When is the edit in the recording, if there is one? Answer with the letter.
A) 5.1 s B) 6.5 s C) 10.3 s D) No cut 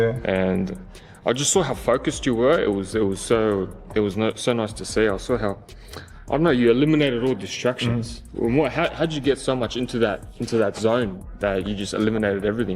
C